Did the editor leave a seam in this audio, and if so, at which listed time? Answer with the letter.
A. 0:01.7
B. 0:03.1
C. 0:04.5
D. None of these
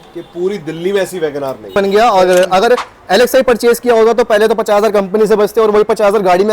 A